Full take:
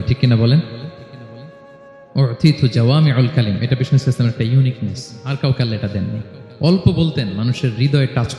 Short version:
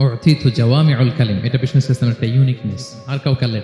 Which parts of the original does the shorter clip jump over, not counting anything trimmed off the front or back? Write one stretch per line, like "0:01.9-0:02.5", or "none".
none